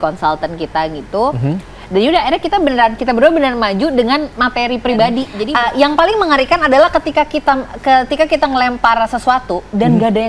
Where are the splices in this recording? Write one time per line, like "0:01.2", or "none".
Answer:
0:05.4